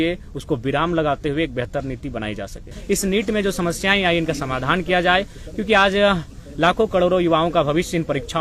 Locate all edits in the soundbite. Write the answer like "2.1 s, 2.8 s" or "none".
2.7 s